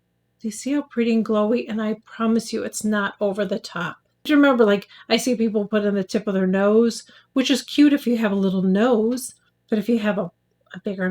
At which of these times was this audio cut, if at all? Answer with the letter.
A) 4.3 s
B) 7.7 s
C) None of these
A